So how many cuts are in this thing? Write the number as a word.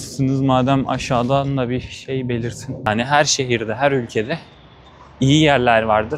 one